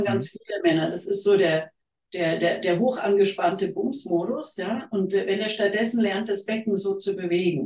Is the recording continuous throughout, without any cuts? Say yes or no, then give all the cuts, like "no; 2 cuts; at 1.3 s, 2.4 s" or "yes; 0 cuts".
yes; 0 cuts